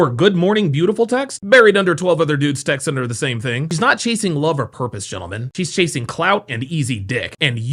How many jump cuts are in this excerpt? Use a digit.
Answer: 0